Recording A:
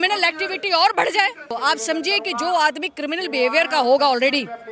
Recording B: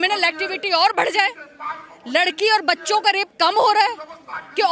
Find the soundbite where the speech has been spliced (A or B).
A